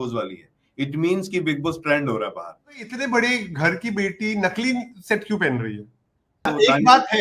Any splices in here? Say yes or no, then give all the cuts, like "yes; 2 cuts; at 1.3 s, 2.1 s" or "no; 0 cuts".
yes; 2 cuts; at 2.9 s, 6.5 s